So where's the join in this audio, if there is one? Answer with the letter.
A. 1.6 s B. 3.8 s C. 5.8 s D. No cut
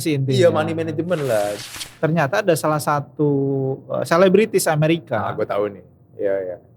A